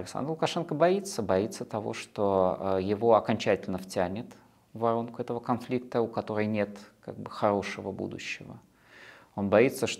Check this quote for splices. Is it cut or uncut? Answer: uncut